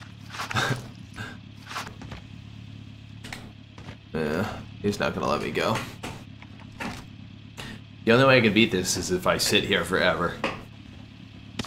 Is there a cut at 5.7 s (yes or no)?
no